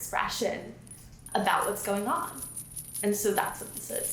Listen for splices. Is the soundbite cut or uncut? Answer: uncut